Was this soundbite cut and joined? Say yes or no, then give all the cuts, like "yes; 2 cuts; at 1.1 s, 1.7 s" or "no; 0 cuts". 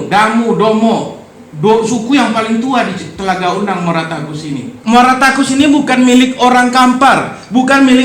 yes; 1 cut; at 4.7 s